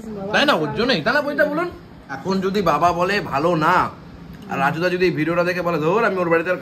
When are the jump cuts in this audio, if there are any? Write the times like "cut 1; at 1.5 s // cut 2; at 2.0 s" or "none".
cut 1; at 2.2 s

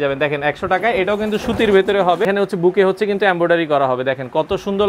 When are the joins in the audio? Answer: cut 1; at 2.2 s

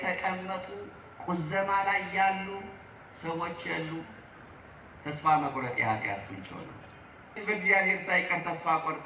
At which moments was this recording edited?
cut 1; at 7.4 s

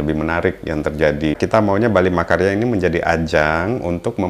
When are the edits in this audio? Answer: cut 1; at 1.4 s

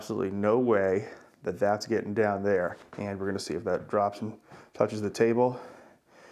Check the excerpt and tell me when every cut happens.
cut 1; at 2.8 s

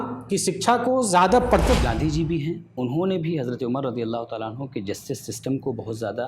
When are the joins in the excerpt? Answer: cut 1; at 1.8 s

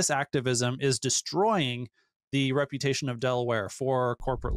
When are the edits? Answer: none

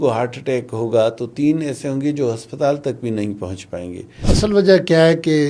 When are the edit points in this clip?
cut 1; at 4.1 s

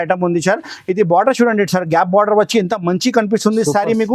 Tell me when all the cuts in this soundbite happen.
none

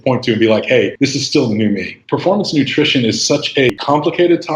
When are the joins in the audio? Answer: cut 1; at 0.9 s // cut 2; at 1.9 s // cut 3; at 3.7 s

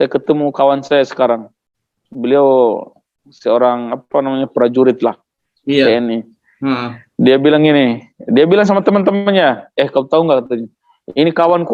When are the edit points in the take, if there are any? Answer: none

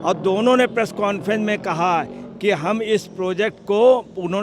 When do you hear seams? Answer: none

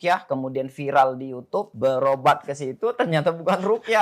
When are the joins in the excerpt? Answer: cut 1; at 1.7 s

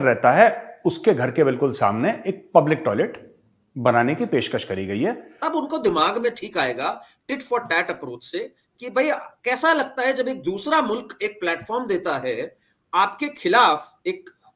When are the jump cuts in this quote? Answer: cut 1; at 5.3 s

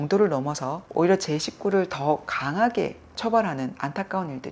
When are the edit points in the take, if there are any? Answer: none

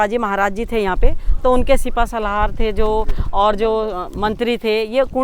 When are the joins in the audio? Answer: none

